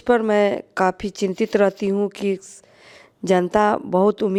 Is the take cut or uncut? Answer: uncut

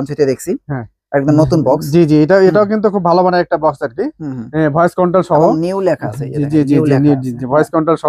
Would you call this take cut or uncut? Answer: uncut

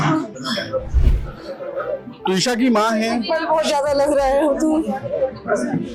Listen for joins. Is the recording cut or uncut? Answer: uncut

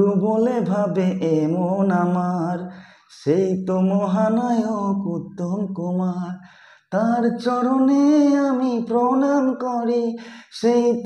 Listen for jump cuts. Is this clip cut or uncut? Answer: uncut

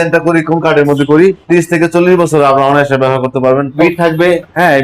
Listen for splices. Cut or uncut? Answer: cut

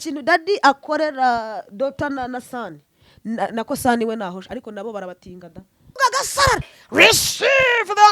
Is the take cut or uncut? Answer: cut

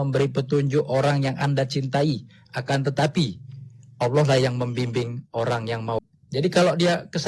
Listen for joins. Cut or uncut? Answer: cut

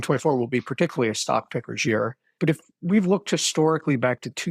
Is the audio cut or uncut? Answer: cut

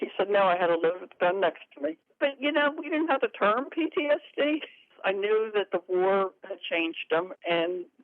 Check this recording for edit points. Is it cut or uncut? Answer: cut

